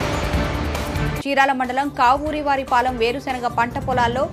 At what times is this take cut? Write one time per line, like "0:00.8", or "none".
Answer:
0:00.9